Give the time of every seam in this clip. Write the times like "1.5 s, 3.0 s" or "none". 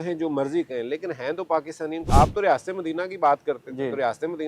2.1 s